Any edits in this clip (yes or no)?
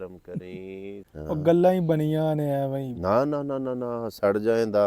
yes